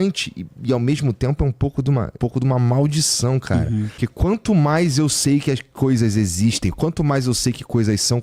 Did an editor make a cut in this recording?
yes; 2 cuts; at 2.2 s, 3.9 s

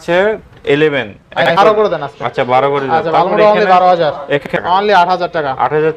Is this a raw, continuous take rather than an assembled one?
no; 2 cuts; at 1.5 s, 4.5 s

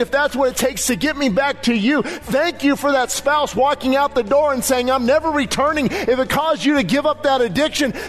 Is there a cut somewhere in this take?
no; 0 cuts

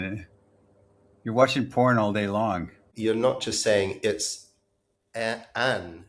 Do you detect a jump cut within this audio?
yes; 1 cut; at 2.9 s

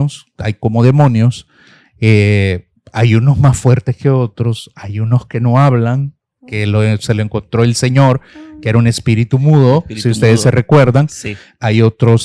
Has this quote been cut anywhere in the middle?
no; 0 cuts

